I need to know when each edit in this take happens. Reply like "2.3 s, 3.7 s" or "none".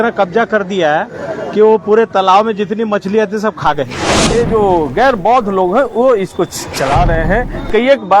4.1 s